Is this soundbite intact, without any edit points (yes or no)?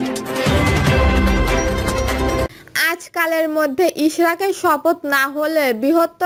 yes